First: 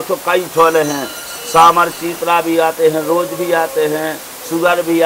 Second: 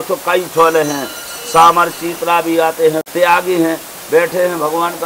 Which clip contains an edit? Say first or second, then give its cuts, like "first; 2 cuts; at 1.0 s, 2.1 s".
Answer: second; 1 cut; at 3.0 s